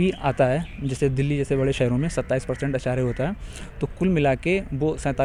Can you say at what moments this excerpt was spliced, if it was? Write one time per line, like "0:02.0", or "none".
none